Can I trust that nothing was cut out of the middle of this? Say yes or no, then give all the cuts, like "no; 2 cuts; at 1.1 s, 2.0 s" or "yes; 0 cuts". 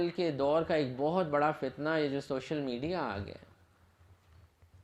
yes; 0 cuts